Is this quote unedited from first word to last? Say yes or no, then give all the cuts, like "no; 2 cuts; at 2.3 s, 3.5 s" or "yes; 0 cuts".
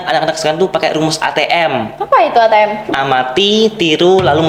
yes; 0 cuts